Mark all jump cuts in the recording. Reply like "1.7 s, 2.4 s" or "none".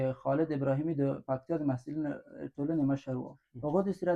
none